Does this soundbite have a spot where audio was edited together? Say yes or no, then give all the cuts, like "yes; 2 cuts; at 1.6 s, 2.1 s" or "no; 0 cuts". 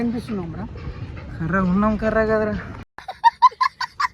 yes; 1 cut; at 2.7 s